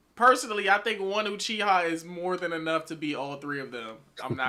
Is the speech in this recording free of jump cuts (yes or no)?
yes